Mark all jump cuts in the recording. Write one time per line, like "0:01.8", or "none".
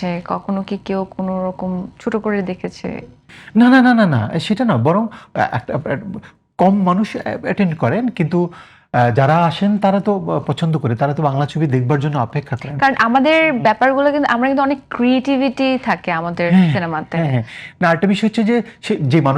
none